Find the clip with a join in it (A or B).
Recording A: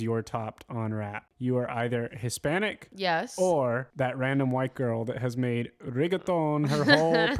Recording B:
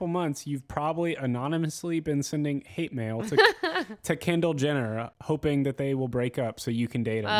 A